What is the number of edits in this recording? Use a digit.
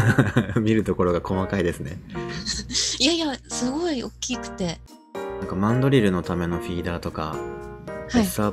1